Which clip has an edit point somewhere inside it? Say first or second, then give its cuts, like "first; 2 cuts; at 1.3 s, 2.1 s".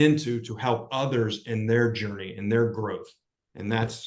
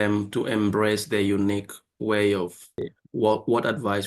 second; 1 cut; at 3.0 s